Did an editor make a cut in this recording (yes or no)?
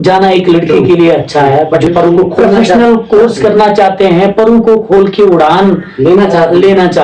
yes